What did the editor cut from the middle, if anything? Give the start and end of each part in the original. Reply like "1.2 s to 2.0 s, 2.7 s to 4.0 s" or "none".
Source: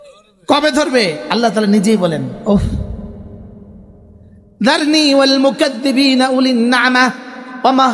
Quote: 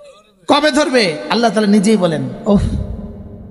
none